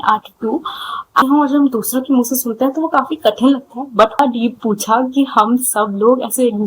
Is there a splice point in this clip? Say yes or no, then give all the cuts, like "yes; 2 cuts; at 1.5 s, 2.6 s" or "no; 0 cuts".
yes; 2 cuts; at 1.2 s, 4.2 s